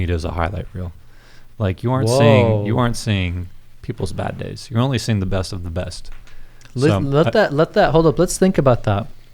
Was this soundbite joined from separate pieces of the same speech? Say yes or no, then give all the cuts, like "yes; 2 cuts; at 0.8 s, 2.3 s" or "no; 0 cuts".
no; 0 cuts